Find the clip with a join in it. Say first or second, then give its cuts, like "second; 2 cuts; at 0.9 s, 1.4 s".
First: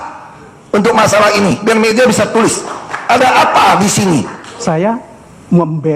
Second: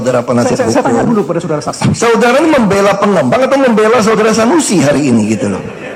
first; 1 cut; at 4.6 s